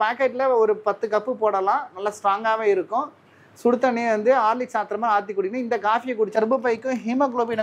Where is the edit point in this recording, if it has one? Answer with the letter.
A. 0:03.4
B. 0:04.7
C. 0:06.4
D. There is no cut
C